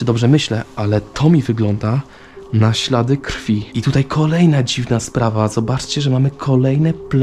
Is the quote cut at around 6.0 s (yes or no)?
no